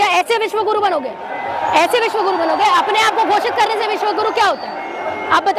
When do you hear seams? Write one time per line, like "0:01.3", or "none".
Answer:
none